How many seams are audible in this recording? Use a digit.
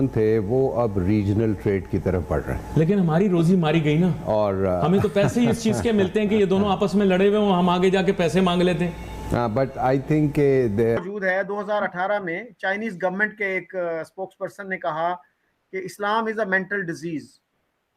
1